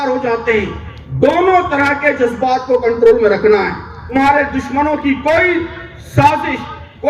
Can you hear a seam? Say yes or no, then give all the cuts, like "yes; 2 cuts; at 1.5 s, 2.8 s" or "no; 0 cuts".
yes; 1 cut; at 4.1 s